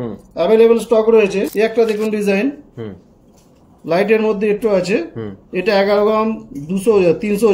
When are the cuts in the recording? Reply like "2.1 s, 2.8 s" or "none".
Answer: 1.5 s